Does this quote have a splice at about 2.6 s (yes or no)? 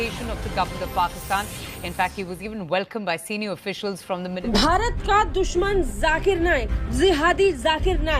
no